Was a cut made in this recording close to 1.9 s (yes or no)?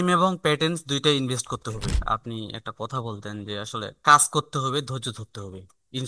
yes